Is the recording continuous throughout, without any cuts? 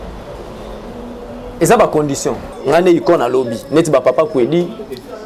no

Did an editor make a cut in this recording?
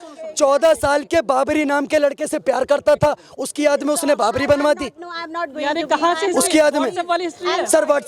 no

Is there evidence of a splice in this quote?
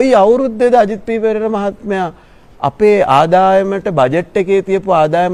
no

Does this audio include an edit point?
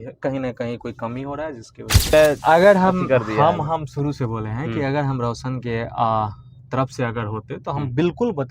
yes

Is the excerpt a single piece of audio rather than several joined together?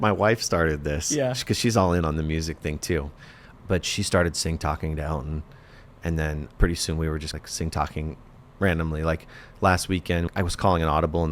no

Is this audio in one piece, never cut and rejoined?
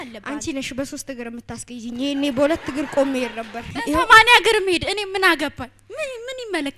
no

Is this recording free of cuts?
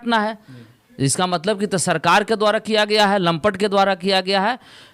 yes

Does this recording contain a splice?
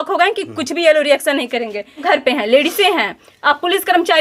yes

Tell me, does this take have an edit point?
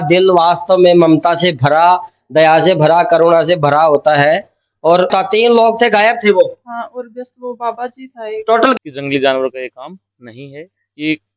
yes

